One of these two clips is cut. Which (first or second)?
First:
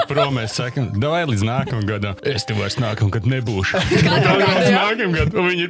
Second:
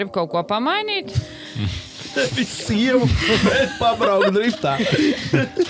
first